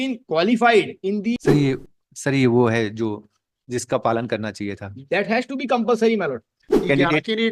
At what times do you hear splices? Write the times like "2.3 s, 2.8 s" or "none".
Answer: 1.4 s, 6.6 s